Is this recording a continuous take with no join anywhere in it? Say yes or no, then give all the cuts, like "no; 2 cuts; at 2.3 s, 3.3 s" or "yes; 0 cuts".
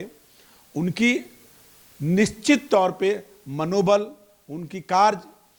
yes; 0 cuts